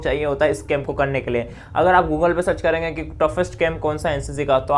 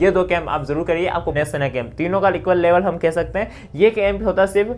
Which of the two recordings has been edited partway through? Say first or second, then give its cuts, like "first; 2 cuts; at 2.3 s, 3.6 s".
second; 1 cut; at 1.3 s